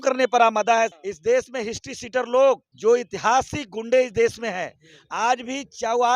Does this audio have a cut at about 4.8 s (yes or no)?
no